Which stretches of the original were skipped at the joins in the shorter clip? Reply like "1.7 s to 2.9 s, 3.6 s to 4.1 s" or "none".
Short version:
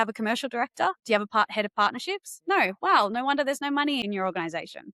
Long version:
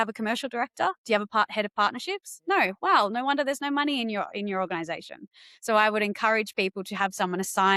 4.0 s to 4.4 s